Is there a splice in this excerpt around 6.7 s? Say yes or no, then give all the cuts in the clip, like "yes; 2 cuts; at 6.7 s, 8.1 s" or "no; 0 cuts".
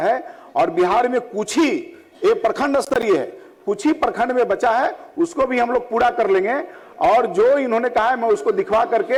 no; 0 cuts